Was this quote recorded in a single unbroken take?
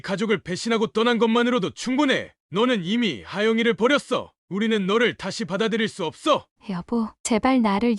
no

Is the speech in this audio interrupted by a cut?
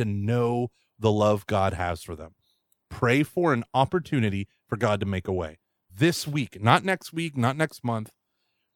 yes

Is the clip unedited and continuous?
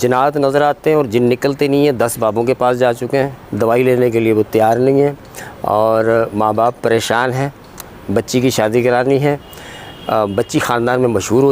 no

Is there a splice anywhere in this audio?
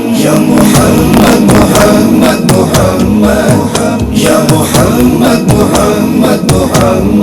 no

